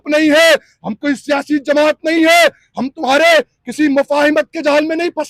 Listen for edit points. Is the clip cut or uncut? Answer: uncut